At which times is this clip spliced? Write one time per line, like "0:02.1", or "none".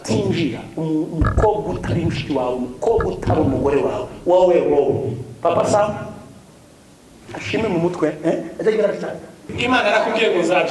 0:09.5